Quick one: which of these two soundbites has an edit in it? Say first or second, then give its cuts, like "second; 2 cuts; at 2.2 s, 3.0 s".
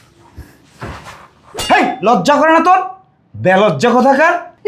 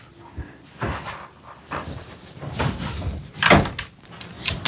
first; 1 cut; at 1.5 s